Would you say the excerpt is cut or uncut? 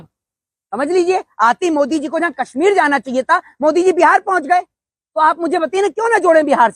uncut